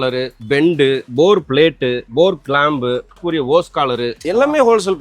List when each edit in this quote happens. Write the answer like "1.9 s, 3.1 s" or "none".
1.1 s, 2.0 s, 3.2 s, 4.2 s